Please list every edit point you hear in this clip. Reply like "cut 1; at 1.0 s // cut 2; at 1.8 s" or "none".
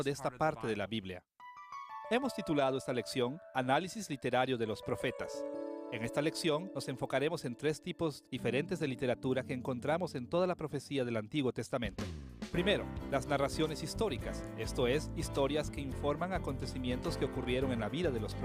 cut 1; at 4.3 s